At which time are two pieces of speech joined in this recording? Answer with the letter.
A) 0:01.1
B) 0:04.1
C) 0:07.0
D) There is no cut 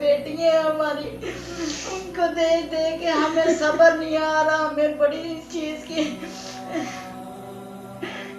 D